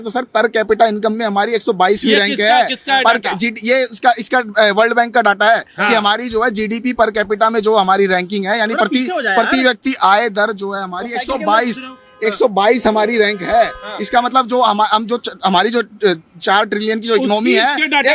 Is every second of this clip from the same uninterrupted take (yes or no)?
yes